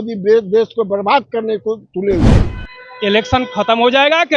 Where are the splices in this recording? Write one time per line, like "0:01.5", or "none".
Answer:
0:02.3